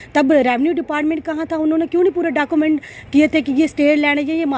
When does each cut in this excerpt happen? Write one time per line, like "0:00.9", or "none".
none